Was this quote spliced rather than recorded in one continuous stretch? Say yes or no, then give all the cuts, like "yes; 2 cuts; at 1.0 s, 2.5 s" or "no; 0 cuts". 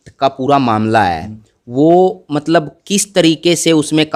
no; 0 cuts